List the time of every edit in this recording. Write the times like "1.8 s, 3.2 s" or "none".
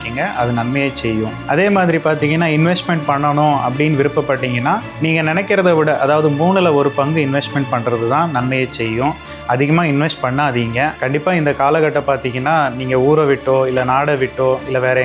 1.4 s, 11.0 s